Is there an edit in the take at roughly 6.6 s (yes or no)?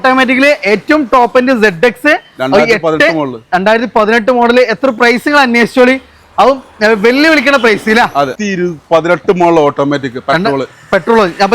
no